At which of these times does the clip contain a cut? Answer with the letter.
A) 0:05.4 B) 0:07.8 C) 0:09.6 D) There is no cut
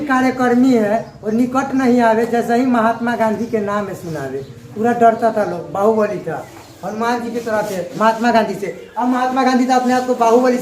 B